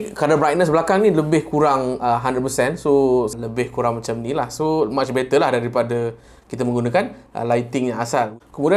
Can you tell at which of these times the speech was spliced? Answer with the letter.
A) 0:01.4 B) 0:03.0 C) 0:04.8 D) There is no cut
D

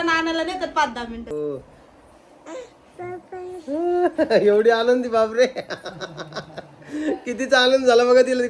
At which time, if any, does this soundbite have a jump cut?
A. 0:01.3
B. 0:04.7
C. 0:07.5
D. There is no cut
A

